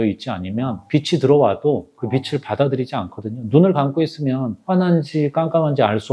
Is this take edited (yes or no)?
no